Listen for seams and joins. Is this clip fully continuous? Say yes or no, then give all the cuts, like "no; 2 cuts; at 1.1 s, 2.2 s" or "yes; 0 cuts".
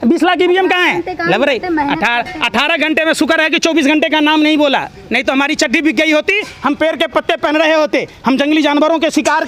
yes; 0 cuts